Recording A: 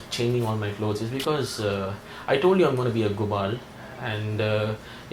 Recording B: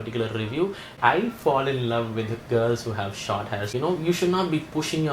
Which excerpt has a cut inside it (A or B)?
B